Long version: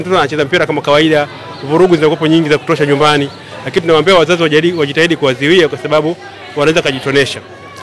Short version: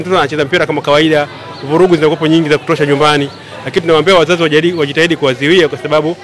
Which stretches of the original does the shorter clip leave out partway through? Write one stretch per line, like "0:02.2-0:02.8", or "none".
none